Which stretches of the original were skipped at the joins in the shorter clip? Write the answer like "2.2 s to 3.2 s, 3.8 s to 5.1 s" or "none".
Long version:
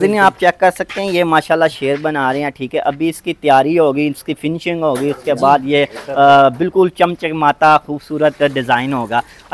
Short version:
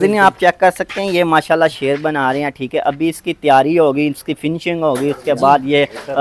none